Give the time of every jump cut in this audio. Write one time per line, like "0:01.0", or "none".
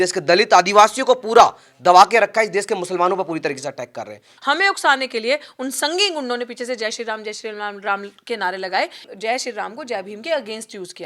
0:04.3
0:09.1